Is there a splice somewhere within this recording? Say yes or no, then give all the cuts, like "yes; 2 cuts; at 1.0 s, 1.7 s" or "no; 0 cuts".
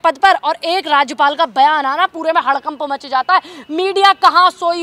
no; 0 cuts